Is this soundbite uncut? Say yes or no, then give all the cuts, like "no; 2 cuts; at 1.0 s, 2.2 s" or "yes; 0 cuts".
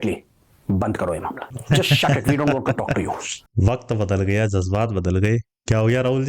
no; 1 cut; at 1.5 s